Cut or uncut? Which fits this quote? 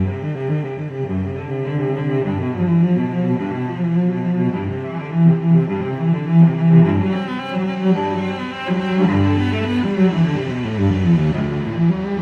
uncut